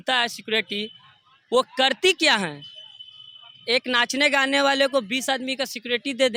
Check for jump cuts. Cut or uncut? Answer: uncut